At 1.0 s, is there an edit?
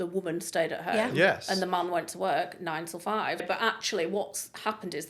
no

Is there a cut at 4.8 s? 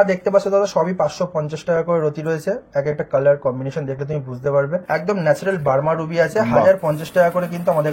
yes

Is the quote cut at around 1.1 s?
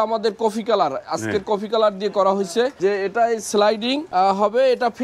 no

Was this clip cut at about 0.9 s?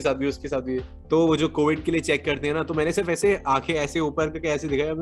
yes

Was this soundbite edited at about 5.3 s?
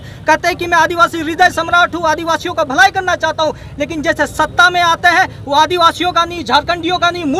no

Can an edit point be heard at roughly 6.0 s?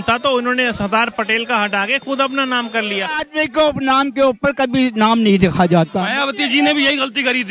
yes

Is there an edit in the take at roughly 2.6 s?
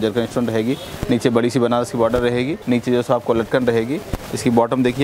yes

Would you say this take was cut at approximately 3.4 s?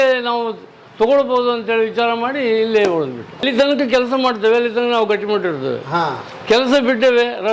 yes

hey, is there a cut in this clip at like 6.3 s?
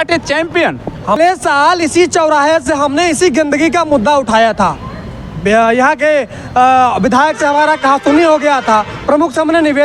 no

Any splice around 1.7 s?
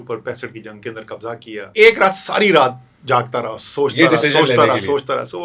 yes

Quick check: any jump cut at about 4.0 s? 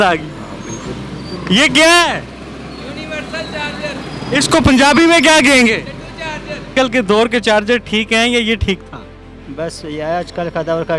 no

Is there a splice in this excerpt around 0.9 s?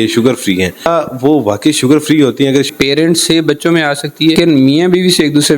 yes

